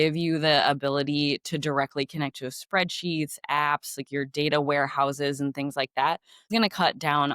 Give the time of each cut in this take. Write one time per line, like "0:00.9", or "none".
0:06.3